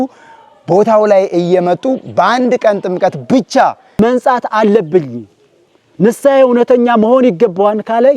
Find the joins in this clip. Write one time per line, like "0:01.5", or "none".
0:03.9